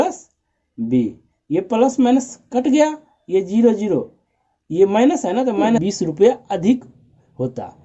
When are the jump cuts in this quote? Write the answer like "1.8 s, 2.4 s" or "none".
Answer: 5.8 s